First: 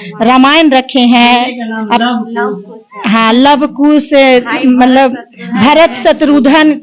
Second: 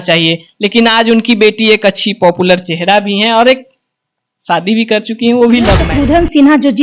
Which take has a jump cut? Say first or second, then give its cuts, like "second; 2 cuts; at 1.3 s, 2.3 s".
second; 1 cut; at 5.8 s